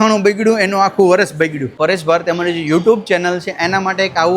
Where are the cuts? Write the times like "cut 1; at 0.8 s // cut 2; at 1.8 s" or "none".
cut 1; at 1.8 s

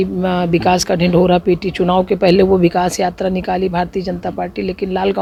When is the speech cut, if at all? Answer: none

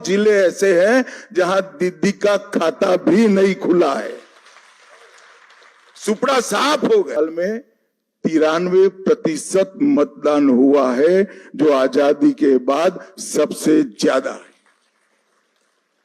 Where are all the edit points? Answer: cut 1; at 7.2 s

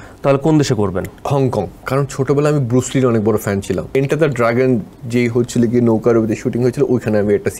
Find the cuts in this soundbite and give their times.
cut 1; at 1.7 s // cut 2; at 4.0 s

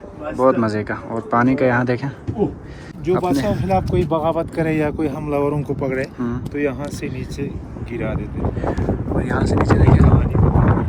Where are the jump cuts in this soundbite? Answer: cut 1; at 2.9 s

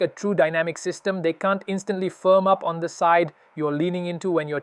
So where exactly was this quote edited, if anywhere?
none

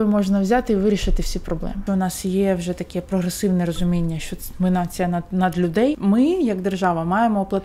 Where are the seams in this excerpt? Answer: cut 1; at 1.8 s // cut 2; at 6.0 s

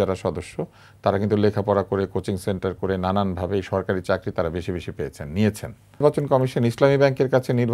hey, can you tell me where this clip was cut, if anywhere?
cut 1; at 6.0 s

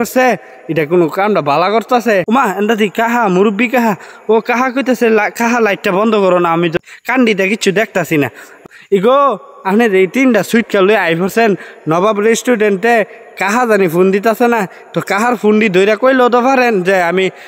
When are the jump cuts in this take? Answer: cut 1; at 2.2 s // cut 2; at 6.8 s // cut 3; at 8.6 s

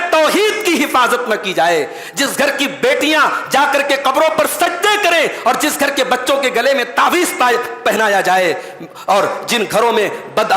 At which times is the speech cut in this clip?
none

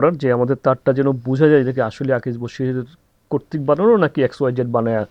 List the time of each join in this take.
none

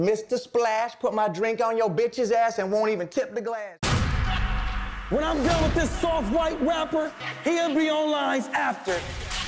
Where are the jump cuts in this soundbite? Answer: cut 1; at 3.8 s

